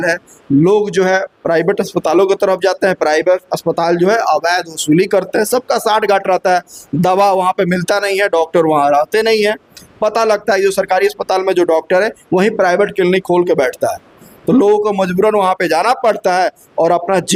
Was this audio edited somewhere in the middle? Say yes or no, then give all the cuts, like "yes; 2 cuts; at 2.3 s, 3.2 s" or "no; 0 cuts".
no; 0 cuts